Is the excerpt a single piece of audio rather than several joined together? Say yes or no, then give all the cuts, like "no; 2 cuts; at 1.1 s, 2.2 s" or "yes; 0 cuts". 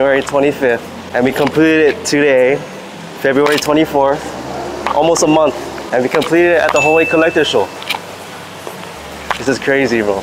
no; 2 cuts; at 1.0 s, 5.7 s